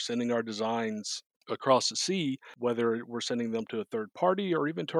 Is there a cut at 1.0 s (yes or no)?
no